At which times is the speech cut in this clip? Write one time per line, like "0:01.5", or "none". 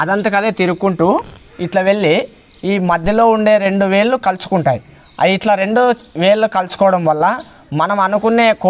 none